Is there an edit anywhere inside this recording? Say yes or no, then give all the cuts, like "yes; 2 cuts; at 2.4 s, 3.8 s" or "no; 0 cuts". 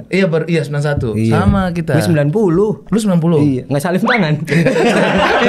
no; 0 cuts